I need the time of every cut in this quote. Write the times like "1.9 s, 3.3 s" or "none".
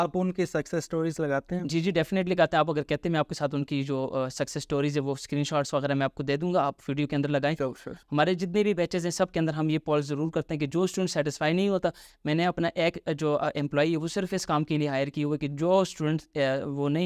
none